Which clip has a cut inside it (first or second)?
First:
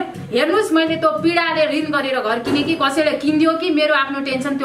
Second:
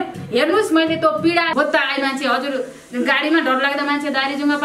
second